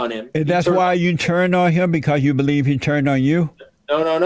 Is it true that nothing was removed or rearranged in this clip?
yes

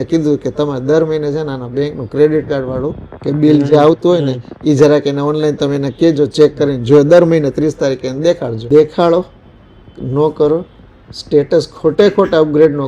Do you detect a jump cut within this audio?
yes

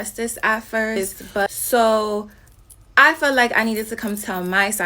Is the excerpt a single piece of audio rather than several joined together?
no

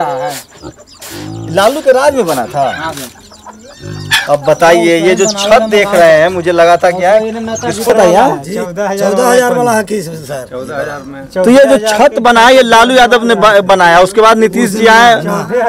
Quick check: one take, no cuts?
no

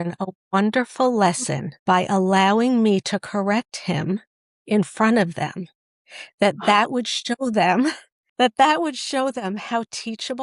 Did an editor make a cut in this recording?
no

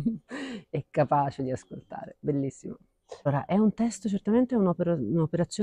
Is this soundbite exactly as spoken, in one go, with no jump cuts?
no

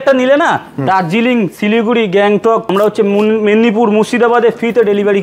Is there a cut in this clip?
yes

